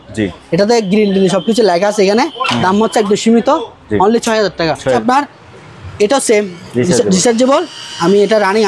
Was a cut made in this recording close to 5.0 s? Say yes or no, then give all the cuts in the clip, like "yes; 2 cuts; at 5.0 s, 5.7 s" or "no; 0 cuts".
yes; 1 cut; at 5.0 s